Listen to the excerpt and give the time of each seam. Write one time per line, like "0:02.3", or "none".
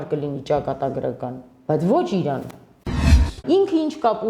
0:03.2